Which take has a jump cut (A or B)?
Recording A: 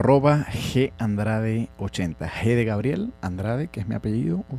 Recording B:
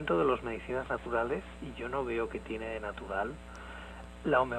A